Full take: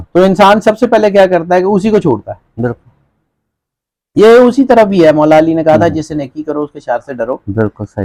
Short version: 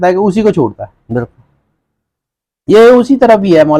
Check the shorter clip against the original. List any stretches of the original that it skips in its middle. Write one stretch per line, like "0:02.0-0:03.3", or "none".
none

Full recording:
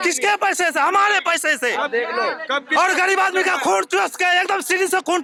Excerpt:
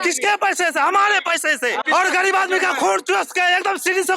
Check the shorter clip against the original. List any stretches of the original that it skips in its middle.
0:01.8-0:02.7

